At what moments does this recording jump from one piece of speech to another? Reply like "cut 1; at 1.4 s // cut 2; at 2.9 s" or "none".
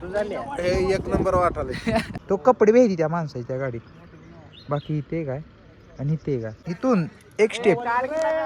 cut 1; at 2.1 s // cut 2; at 6.7 s

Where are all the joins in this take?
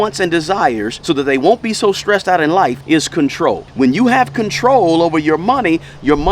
cut 1; at 0.9 s // cut 2; at 2.8 s // cut 3; at 3.7 s

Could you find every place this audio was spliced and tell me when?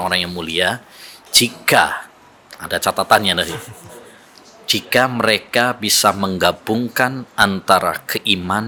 none

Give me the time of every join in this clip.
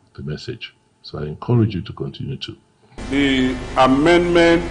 cut 1; at 3.0 s

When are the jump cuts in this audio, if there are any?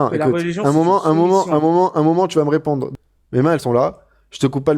cut 1; at 2.9 s

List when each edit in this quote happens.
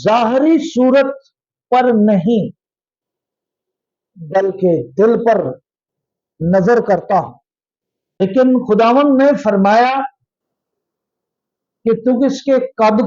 cut 1; at 8.4 s

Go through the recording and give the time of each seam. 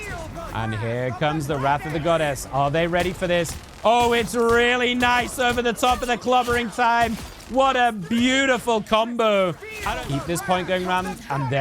cut 1; at 9.7 s

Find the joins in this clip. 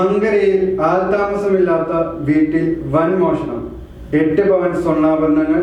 none

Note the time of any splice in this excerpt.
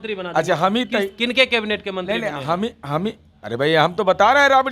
none

